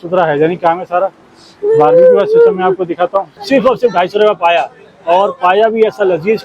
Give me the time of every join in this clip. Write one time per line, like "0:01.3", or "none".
0:03.4